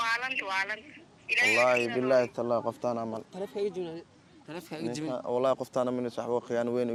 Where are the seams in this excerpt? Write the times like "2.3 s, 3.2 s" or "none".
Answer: none